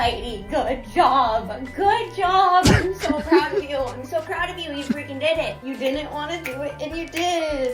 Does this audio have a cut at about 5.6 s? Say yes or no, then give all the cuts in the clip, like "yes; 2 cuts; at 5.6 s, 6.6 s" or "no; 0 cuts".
yes; 1 cut; at 5.6 s